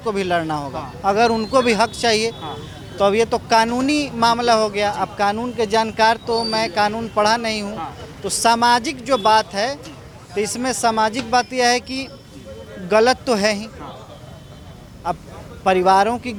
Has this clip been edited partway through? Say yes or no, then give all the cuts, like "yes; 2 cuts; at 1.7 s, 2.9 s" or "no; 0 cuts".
no; 0 cuts